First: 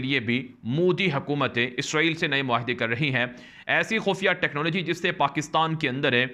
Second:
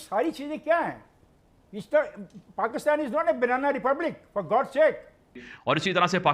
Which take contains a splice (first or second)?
second